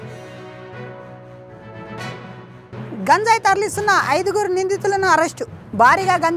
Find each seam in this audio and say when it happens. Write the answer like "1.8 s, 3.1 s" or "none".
1.4 s